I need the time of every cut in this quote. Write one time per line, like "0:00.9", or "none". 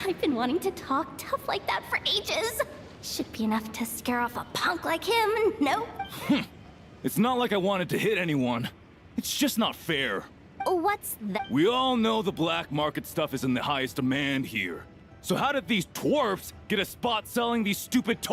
0:06.0
0:10.4
0:11.4